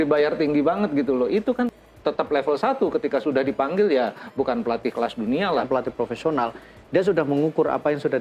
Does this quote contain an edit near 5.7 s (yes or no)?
yes